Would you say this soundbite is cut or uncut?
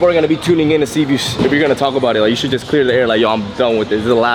uncut